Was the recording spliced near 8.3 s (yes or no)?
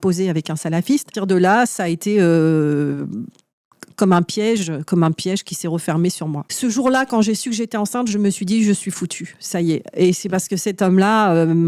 no